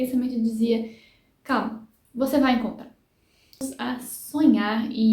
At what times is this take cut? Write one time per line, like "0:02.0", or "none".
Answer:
0:03.7